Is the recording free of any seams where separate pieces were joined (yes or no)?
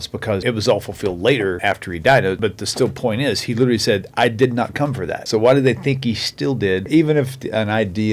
no